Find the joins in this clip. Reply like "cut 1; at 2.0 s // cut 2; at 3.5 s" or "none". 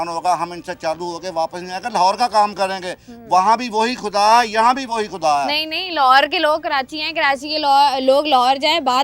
none